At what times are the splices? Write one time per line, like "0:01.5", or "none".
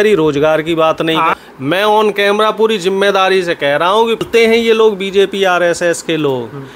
0:01.3
0:04.3